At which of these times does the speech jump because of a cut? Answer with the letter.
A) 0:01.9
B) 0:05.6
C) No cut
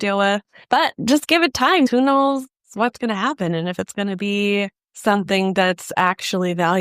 A